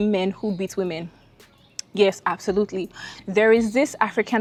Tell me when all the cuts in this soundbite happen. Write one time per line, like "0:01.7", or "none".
none

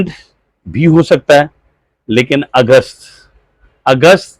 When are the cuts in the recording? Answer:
none

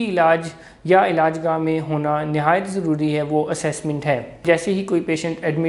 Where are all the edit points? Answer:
0:04.4

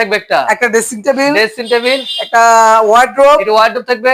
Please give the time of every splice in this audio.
none

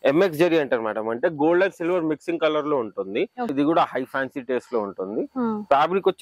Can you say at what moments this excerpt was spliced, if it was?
0:03.5

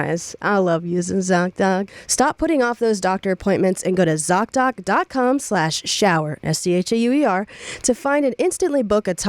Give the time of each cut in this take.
0:02.0

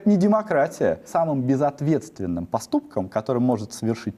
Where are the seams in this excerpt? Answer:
0:01.0

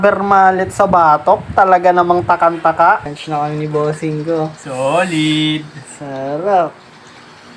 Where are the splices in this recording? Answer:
0:03.1

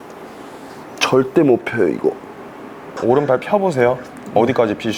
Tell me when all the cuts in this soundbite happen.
0:02.9

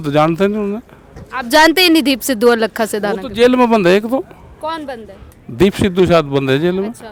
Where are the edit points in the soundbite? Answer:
none

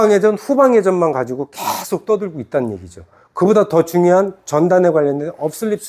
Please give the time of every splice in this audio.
none

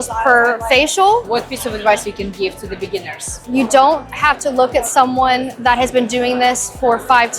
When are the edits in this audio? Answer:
0:01.3
0:03.4
0:05.5

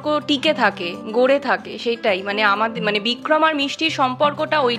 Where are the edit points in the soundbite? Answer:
none

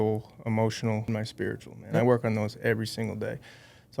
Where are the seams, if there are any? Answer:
0:01.1

